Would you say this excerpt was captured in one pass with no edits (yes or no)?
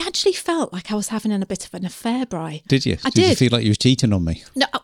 yes